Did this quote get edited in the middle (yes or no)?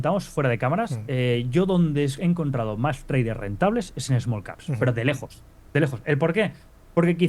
no